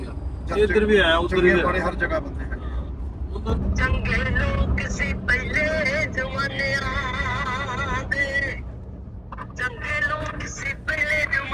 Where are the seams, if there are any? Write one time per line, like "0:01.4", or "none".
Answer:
0:03.5